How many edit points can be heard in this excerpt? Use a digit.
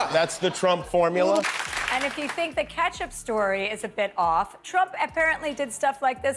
1